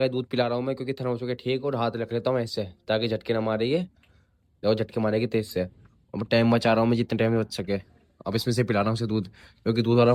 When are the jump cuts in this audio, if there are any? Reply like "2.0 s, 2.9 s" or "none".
none